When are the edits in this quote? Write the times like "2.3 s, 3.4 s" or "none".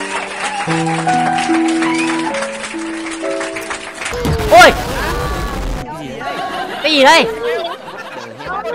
4.2 s